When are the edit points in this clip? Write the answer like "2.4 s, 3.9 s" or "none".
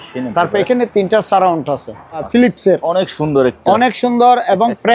2.3 s